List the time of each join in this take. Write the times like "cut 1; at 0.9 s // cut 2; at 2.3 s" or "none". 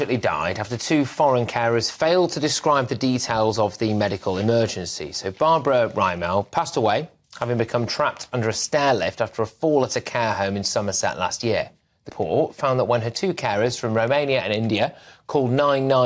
cut 1; at 12.1 s